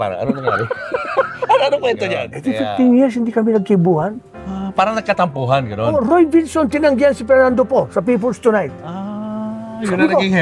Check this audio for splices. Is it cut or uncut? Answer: cut